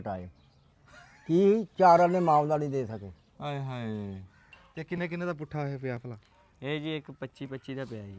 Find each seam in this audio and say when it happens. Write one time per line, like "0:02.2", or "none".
0:04.4